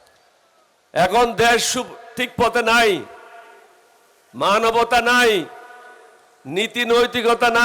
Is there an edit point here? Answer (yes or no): no